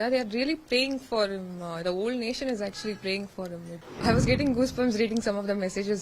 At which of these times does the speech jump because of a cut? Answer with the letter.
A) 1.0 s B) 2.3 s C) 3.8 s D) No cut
C